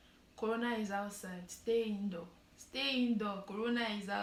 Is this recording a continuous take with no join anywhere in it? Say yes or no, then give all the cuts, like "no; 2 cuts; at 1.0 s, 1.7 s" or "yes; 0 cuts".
yes; 0 cuts